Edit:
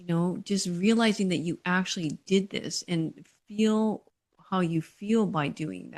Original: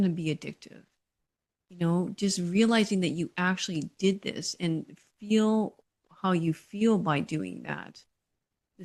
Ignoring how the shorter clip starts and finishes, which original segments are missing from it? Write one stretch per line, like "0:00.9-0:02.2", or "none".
none